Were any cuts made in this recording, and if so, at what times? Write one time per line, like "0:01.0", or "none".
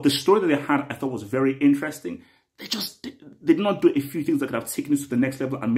none